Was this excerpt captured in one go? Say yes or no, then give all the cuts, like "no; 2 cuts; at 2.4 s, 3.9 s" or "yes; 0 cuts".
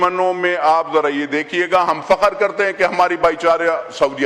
yes; 0 cuts